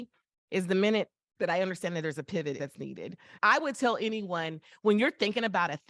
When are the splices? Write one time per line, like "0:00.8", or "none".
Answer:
0:02.6